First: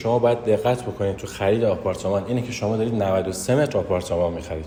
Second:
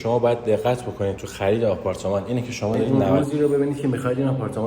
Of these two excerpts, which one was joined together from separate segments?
second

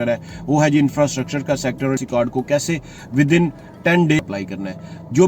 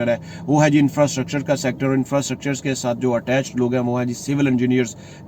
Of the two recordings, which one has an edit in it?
first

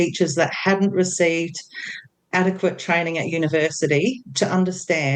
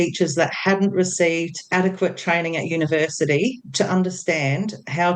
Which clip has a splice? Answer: second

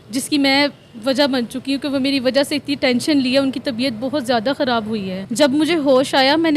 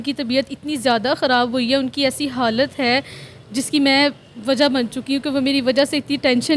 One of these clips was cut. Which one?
first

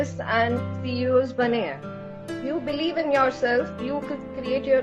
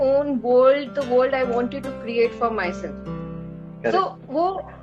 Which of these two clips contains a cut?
first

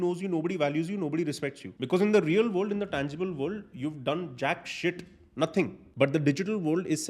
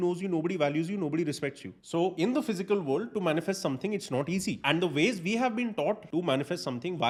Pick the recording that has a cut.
first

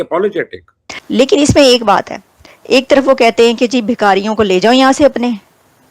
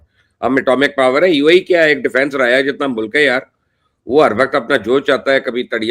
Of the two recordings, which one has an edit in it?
first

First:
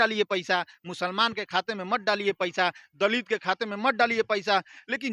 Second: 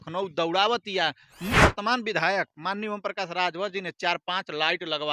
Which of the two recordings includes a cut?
second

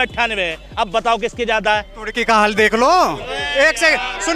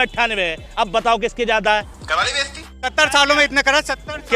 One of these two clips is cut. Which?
second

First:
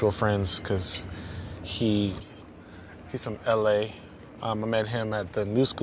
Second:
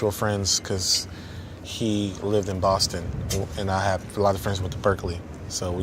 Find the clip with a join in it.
second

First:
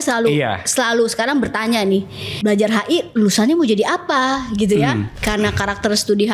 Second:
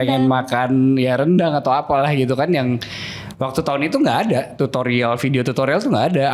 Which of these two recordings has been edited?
first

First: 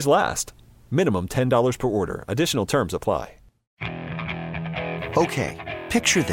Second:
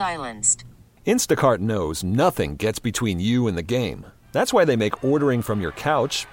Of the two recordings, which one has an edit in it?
first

